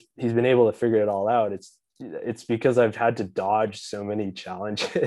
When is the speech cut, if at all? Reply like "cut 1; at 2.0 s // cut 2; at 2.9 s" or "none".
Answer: none